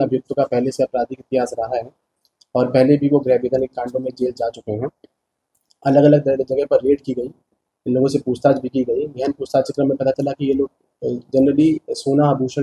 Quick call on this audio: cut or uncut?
uncut